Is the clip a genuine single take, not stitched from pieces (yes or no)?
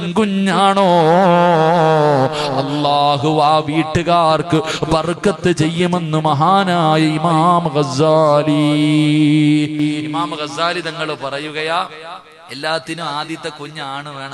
yes